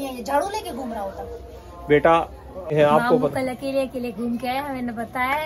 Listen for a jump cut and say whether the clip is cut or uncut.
cut